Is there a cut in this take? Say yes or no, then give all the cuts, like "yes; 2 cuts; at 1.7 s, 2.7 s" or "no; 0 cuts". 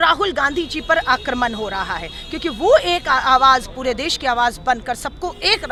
no; 0 cuts